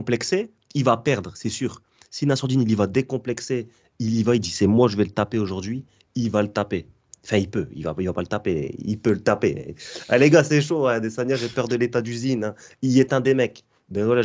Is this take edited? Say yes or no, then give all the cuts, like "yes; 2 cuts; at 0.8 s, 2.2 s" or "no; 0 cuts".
no; 0 cuts